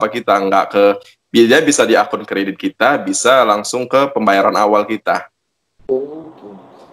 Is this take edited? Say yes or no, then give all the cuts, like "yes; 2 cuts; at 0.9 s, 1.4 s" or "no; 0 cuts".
no; 0 cuts